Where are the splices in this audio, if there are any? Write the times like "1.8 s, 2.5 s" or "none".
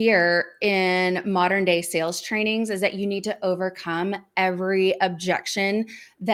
none